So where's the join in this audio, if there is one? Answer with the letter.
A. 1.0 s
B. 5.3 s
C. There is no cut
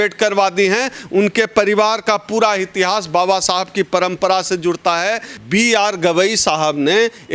B